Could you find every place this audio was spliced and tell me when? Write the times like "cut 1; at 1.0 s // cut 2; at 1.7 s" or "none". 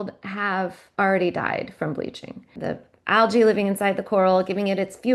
cut 1; at 2.5 s